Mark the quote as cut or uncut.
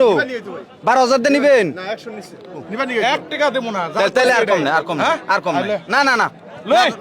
cut